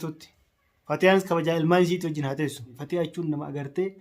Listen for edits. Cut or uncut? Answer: cut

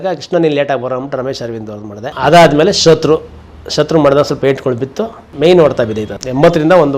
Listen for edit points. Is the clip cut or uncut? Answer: cut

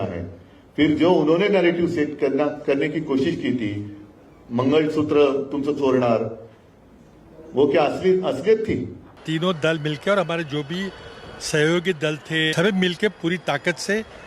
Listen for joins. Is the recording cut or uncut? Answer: cut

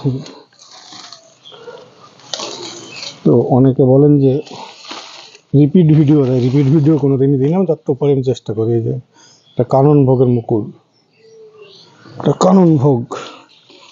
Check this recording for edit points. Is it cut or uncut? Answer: uncut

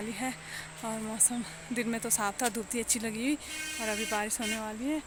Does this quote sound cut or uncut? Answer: uncut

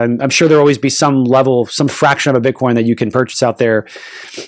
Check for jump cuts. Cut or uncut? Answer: uncut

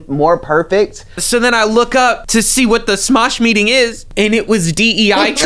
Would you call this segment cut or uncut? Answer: cut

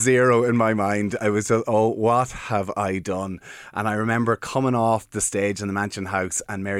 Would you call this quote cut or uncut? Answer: uncut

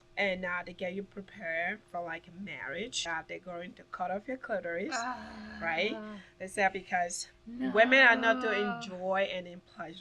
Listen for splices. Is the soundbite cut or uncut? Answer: cut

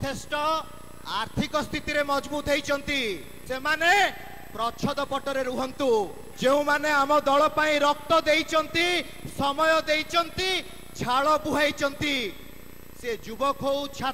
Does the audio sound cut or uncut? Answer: cut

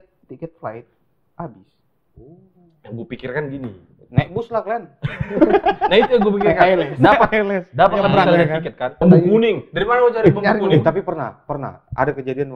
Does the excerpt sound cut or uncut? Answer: cut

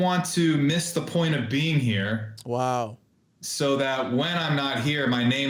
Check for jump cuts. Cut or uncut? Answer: uncut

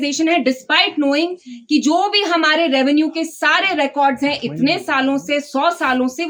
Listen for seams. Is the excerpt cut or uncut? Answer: uncut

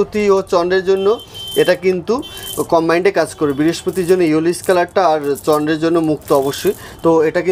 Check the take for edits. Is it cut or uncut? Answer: uncut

